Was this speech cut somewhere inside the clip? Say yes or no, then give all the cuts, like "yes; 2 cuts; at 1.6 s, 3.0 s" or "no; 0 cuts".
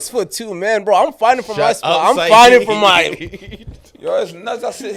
no; 0 cuts